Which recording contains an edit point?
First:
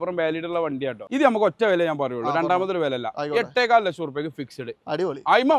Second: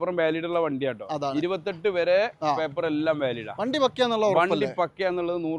first; 1 cut; at 1.0 s

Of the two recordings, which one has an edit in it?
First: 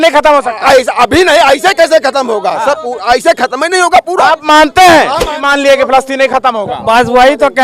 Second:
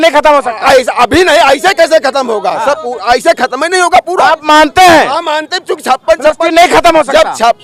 first; 1 cut; at 5.4 s

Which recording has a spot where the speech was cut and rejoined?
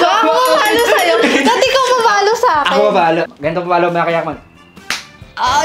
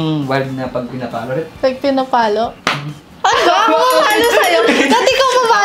first; 1 cut; at 3.3 s

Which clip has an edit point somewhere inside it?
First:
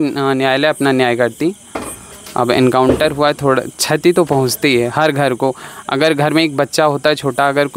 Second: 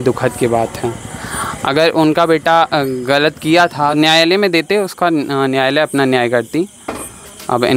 second; 1 cut; at 3.9 s

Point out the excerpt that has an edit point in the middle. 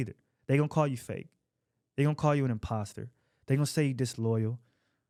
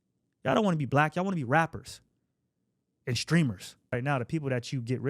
second; 1 cut; at 3.9 s

